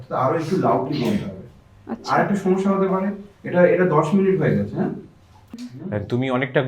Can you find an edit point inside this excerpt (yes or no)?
yes